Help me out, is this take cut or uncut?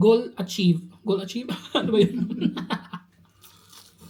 uncut